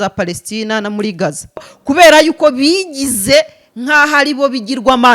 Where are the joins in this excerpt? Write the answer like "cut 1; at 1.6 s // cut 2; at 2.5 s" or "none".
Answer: cut 1; at 1.7 s

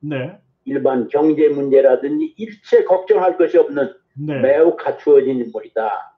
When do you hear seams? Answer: none

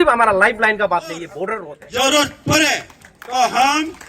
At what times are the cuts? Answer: cut 1; at 1.6 s

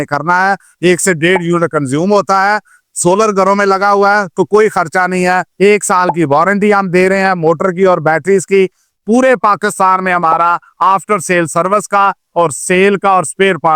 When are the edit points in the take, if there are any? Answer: cut 1; at 5.5 s

